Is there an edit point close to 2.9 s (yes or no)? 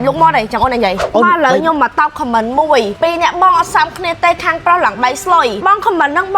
yes